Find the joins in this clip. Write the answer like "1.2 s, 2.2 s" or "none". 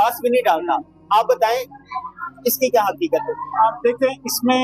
none